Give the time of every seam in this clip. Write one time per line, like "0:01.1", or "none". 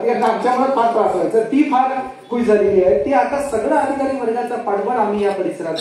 none